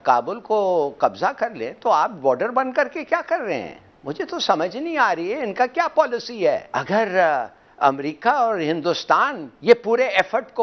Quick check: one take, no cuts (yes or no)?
no